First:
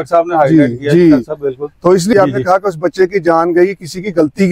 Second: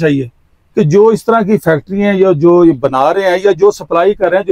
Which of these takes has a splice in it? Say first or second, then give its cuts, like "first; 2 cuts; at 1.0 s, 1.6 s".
first; 1 cut; at 2.1 s